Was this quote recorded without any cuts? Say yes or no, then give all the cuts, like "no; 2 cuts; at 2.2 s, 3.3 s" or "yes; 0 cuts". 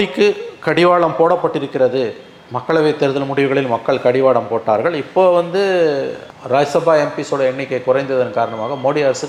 yes; 0 cuts